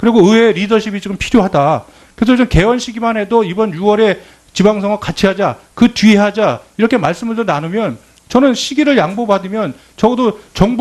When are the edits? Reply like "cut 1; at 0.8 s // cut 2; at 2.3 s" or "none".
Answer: cut 1; at 1.6 s